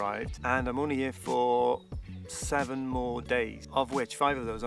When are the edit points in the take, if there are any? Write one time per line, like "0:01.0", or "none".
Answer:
0:03.6